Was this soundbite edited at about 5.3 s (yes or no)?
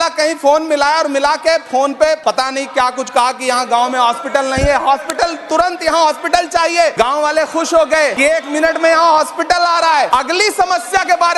no